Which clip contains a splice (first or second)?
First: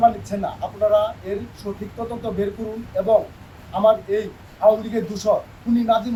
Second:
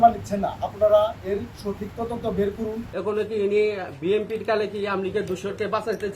second